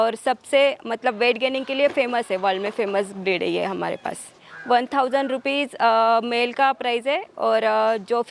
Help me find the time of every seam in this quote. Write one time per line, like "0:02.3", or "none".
0:04.4